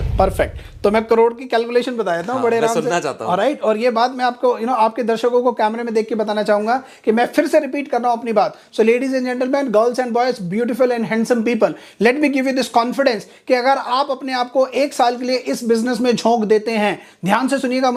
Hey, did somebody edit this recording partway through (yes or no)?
no